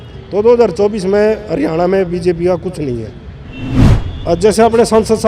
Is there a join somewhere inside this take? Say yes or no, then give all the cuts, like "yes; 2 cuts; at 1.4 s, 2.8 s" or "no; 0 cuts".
yes; 1 cut; at 3.9 s